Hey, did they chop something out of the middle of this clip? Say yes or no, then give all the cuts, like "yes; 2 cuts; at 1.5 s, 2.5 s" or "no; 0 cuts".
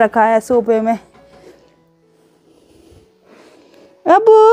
no; 0 cuts